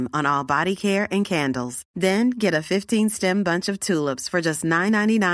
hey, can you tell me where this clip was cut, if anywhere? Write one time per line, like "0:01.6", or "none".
none